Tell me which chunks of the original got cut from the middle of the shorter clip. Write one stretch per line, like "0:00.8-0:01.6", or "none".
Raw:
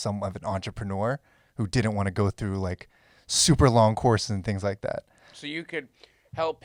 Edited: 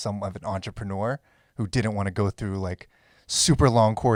none